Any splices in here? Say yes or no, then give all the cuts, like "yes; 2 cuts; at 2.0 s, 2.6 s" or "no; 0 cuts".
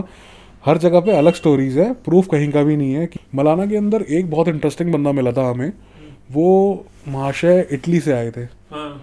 yes; 1 cut; at 3.1 s